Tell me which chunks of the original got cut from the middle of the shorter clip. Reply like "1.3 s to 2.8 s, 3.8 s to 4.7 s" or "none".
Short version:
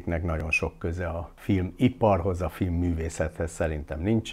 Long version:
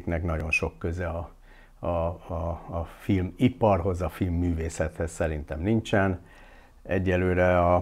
1.3 s to 2.9 s